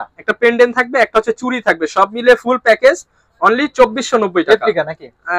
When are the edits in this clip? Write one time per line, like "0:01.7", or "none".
none